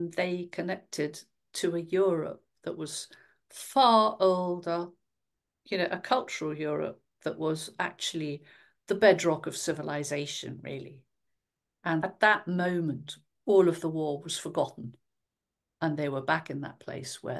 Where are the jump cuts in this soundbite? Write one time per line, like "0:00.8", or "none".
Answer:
0:12.0

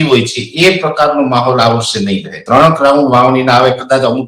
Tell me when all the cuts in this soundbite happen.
0:02.3

